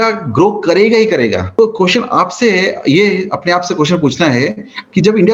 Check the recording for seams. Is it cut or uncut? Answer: cut